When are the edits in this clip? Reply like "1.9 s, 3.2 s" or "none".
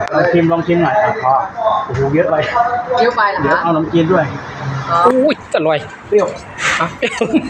5.0 s